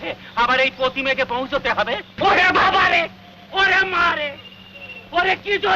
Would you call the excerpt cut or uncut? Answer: cut